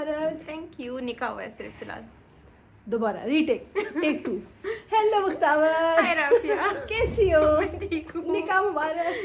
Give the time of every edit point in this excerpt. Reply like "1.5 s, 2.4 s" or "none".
none